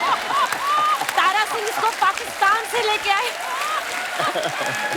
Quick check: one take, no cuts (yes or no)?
yes